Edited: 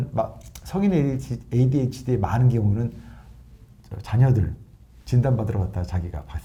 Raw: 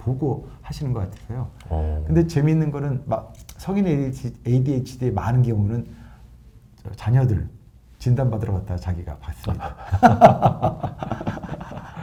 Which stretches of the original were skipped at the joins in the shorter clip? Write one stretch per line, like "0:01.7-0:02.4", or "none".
none